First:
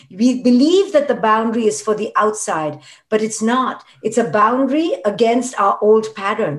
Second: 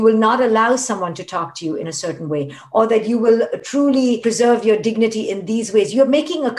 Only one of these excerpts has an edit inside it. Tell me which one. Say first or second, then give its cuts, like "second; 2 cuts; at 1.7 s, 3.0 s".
second; 1 cut; at 2.6 s